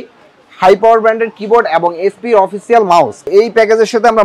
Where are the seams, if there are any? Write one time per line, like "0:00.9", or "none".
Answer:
0:03.3

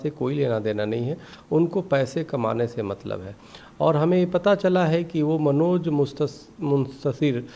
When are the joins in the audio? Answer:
none

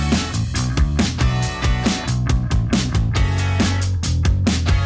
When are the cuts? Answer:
0:02.0

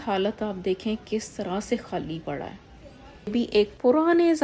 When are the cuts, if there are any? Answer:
0:03.3

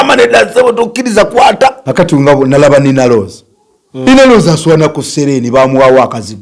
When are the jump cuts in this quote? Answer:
0:01.8

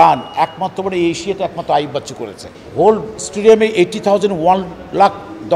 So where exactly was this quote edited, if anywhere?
0:02.6

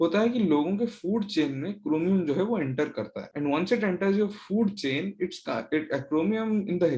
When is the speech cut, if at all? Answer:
none

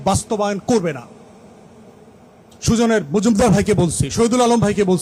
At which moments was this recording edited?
none

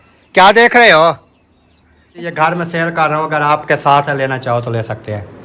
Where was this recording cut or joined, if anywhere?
0:02.3

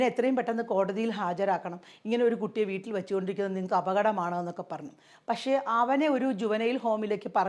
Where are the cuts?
none

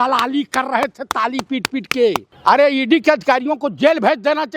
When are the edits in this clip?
0:02.3

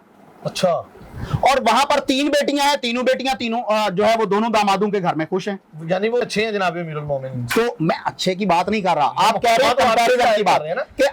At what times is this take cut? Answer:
0:06.3

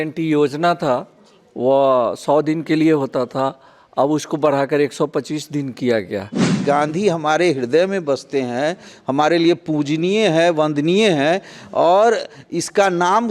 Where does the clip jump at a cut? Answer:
0:06.5

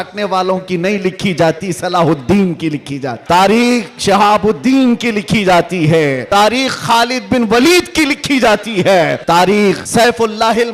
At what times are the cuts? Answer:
0:03.1
0:06.2
0:09.2
0:09.8

